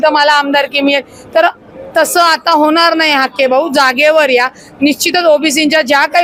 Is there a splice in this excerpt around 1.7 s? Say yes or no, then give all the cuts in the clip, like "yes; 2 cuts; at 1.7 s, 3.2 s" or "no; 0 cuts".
no; 0 cuts